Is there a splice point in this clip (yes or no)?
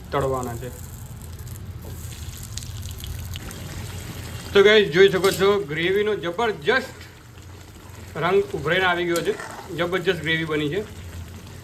yes